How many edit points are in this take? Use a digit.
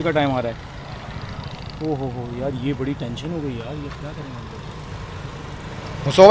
0